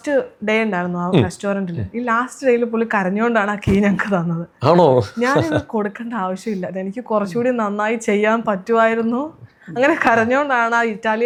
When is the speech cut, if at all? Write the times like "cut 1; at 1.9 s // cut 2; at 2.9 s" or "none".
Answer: none